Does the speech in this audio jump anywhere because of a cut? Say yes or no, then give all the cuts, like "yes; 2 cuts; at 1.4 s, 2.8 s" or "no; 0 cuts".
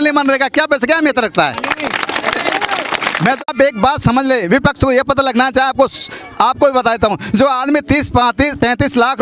yes; 1 cut; at 3.4 s